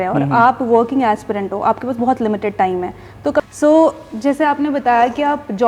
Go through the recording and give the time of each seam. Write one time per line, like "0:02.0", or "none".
0:03.4